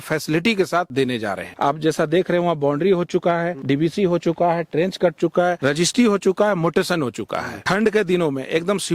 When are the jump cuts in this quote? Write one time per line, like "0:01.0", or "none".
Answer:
0:01.2
0:03.5
0:05.6
0:07.5